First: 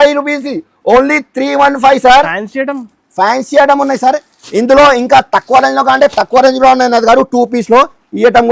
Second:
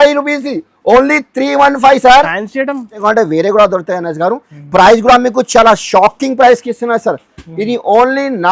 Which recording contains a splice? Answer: second; 1 cut; at 3.0 s

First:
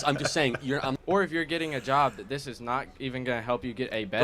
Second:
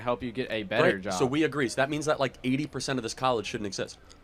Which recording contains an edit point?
first; 1 cut; at 0.9 s

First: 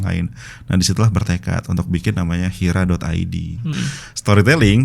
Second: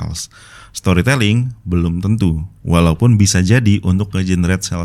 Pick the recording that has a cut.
first; 1 cut; at 3.7 s

